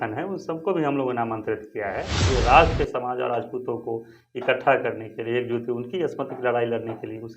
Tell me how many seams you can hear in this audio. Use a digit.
1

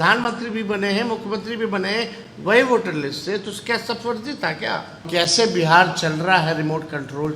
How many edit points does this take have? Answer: 1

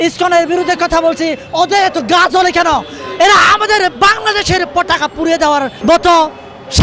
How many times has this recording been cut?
1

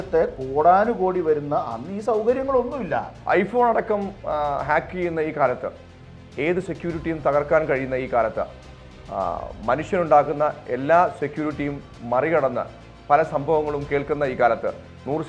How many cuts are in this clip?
1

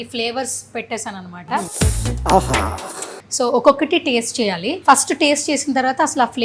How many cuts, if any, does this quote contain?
3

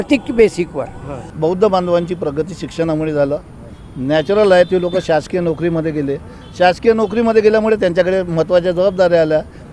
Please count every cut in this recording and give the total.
1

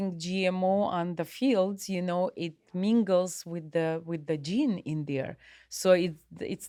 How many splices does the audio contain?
0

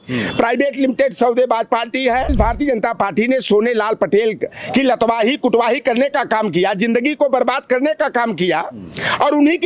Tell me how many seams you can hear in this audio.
1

